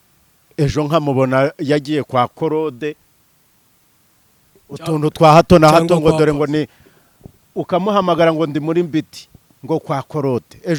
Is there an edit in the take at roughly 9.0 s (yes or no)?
no